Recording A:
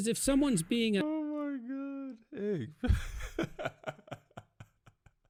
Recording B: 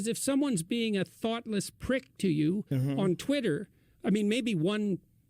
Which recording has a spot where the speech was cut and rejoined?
B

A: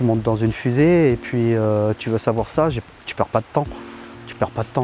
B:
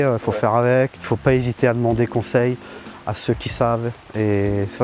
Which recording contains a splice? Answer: B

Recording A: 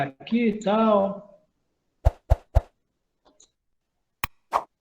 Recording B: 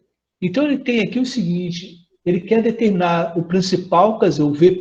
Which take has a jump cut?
A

